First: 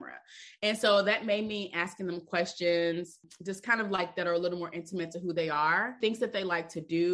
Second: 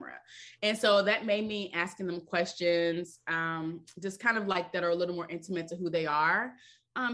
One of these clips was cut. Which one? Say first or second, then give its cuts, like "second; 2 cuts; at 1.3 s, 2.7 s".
first; 2 cuts; at 3.2 s, 5.9 s